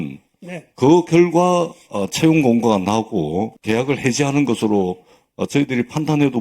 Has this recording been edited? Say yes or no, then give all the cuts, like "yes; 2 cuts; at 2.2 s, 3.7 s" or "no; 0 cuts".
yes; 1 cut; at 3.6 s